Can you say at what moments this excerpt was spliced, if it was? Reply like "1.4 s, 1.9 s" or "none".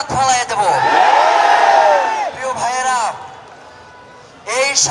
none